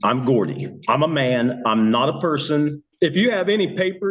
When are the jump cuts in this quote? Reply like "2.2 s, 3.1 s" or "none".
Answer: 2.8 s